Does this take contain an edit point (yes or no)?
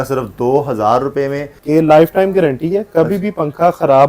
yes